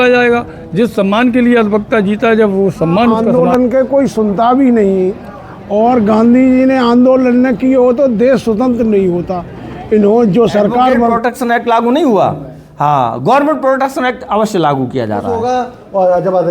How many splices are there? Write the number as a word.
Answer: three